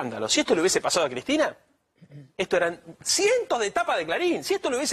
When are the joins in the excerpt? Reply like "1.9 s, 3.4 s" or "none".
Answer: none